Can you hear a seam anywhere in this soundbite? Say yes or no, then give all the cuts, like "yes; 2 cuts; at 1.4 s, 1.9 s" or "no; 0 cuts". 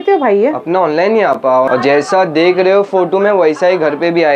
yes; 1 cut; at 1.7 s